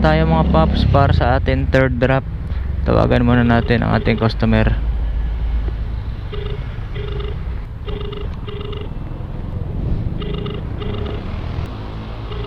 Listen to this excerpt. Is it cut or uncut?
uncut